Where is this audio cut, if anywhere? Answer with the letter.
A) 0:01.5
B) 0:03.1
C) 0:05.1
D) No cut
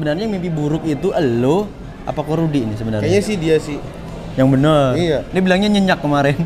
D